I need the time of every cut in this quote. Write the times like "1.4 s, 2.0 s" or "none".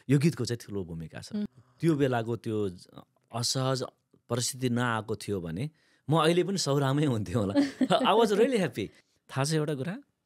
1.5 s, 8.9 s